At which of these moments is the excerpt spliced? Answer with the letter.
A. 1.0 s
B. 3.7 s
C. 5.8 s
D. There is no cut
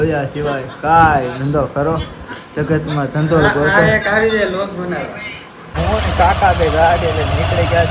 C